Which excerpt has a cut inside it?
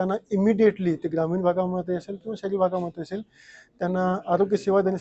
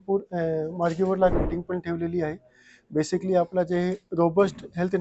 second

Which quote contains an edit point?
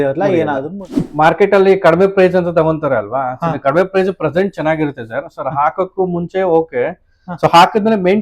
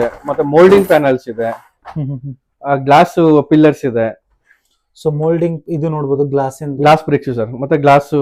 first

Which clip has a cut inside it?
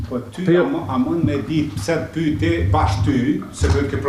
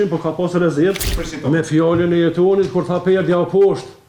second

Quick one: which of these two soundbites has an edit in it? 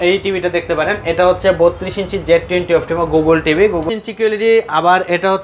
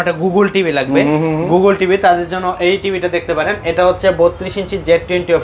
first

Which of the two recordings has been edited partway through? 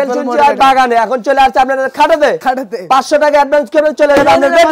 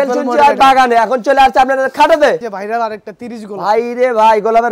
second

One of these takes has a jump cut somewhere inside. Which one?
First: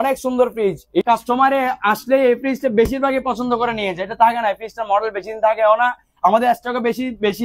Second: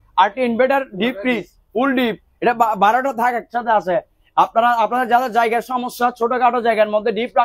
first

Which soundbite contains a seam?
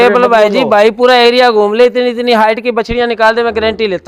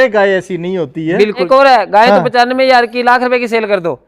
second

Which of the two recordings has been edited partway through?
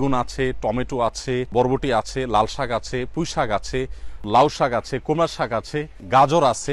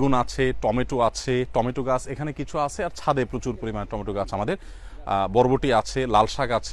first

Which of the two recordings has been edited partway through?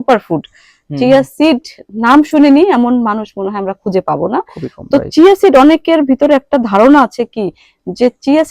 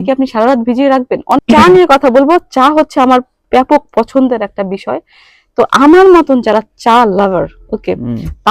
second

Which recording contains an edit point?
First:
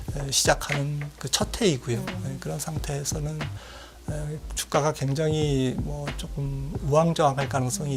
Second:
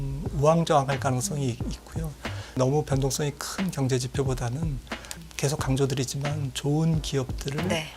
second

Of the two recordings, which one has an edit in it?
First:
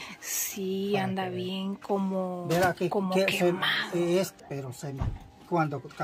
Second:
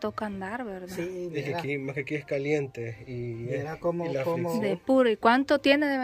first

